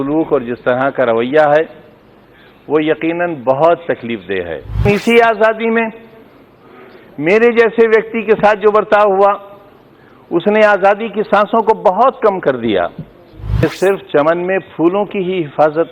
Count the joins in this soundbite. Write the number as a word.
two